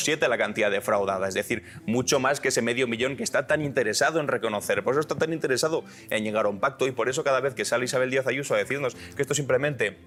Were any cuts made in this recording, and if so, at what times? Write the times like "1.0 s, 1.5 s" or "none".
none